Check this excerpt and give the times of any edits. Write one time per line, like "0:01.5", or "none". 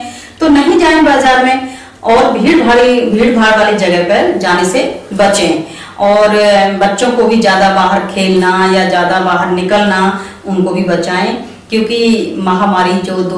none